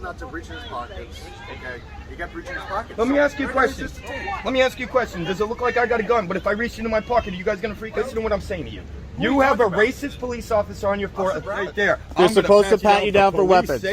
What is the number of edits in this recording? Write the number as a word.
two